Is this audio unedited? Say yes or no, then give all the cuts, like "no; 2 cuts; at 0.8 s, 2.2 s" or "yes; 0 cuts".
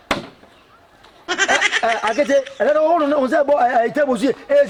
yes; 0 cuts